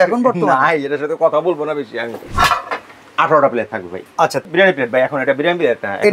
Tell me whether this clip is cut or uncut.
cut